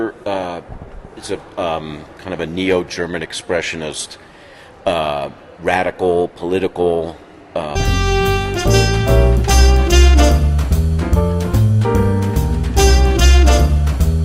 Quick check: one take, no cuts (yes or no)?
yes